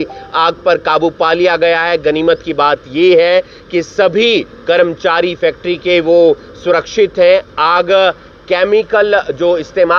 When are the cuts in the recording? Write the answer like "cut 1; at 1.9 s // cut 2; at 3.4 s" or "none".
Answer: none